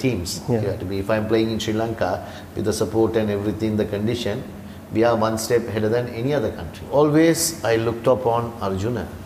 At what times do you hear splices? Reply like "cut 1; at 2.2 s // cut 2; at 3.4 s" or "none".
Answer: cut 1; at 6.8 s